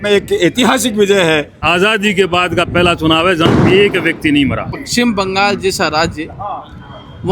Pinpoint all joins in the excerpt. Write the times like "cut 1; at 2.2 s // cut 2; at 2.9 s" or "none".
cut 1; at 1.6 s // cut 2; at 4.8 s